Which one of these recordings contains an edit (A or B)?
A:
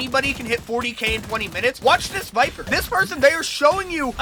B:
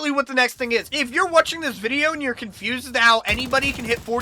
B